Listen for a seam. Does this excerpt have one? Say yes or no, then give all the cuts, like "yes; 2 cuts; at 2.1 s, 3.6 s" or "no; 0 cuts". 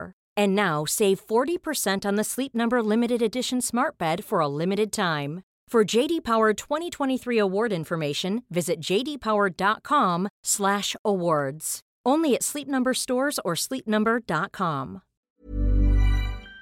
yes; 1 cut; at 15.3 s